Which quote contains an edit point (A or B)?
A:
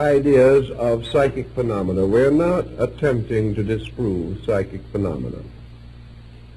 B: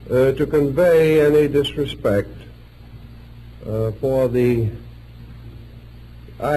A